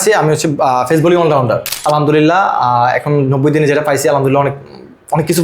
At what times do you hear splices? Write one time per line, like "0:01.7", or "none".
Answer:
0:01.8

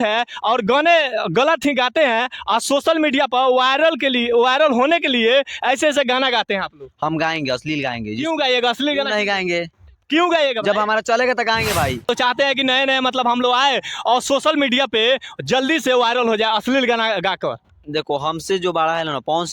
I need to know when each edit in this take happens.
0:12.1

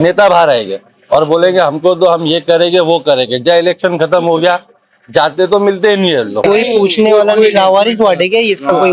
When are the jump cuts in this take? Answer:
0:06.4

